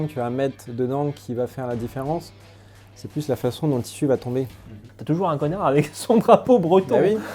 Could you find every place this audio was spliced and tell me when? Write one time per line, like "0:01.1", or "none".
0:04.9